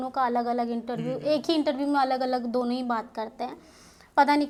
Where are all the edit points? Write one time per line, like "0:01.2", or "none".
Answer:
none